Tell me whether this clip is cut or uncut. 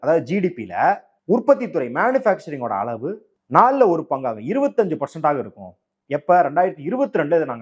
cut